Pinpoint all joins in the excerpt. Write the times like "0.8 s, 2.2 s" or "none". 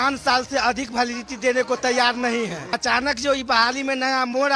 2.8 s